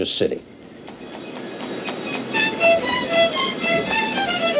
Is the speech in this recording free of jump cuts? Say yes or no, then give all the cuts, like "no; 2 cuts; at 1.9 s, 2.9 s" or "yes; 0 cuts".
yes; 0 cuts